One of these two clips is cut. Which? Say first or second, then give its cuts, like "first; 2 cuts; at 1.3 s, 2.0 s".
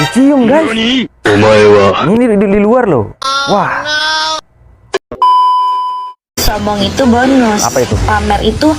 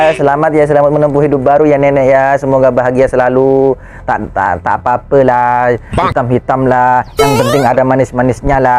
first; 2 cuts; at 4.8 s, 6.4 s